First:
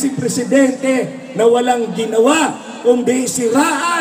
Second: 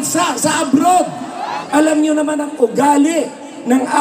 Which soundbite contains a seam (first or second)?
second